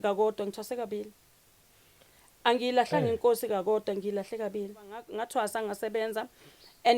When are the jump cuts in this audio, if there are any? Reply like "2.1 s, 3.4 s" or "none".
5.1 s

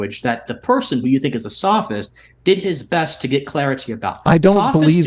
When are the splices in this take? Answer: none

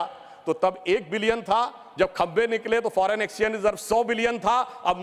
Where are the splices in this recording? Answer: none

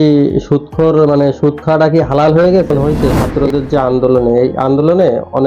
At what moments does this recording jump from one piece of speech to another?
2.8 s

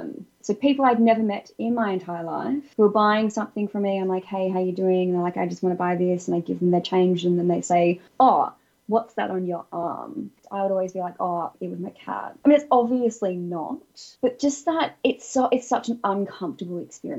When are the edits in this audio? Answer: 10.4 s, 12.3 s, 14.0 s

